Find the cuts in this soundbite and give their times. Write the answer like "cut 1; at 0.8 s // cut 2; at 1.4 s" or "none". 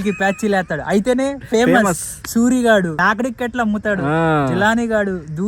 cut 1; at 3.0 s